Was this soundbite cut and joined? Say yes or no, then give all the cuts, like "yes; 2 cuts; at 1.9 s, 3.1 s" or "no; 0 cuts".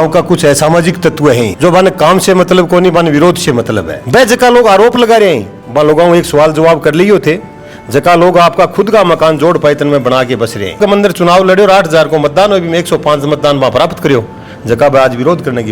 yes; 2 cuts; at 4.0 s, 10.8 s